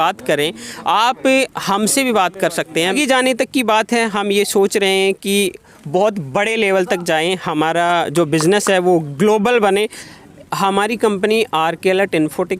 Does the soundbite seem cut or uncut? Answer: cut